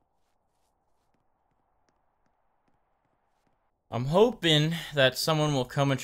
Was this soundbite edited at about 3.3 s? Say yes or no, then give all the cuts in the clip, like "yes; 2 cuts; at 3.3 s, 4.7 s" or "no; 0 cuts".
yes; 1 cut; at 3.3 s